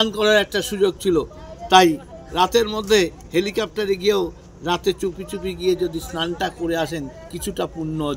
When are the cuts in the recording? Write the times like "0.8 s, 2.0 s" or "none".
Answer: none

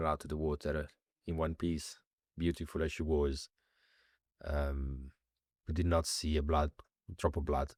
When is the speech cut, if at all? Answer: none

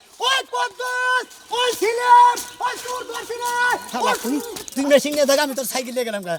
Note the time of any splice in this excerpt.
none

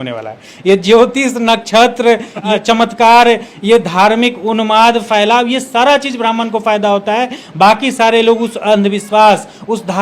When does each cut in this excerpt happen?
2.4 s

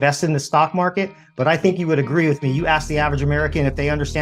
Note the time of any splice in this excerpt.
none

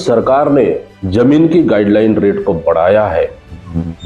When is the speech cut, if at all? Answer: 0.9 s

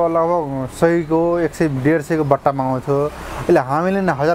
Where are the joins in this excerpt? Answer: none

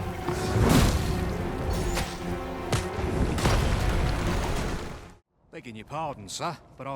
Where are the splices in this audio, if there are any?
5.0 s

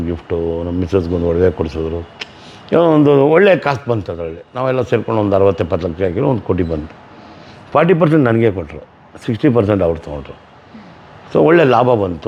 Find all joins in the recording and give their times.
none

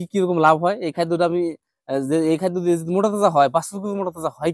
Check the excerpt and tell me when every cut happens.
none

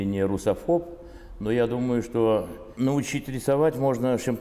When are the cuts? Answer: 2.6 s

